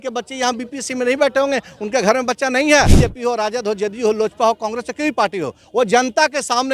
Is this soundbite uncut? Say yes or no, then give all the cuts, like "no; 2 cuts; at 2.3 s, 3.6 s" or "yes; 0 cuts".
no; 1 cut; at 2.9 s